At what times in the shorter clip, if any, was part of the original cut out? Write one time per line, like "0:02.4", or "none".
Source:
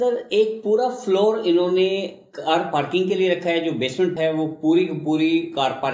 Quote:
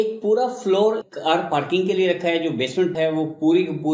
0:01.0